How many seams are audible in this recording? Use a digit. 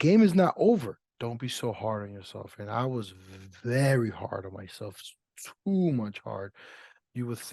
1